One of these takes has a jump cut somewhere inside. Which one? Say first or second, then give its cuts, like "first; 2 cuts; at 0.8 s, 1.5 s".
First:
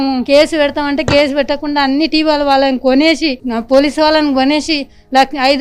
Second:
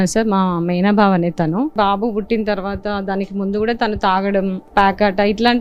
second; 2 cuts; at 1.7 s, 4.6 s